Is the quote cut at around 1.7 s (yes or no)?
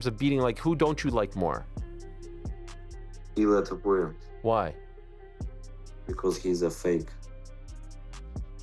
yes